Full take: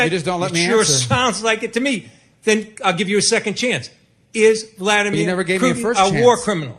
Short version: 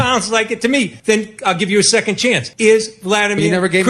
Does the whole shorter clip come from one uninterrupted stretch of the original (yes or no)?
no